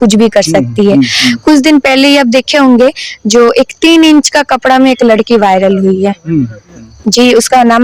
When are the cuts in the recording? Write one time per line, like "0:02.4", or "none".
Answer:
0:01.2